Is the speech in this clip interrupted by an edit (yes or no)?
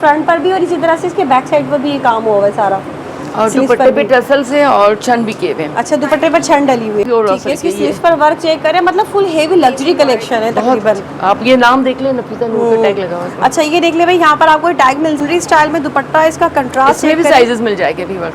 yes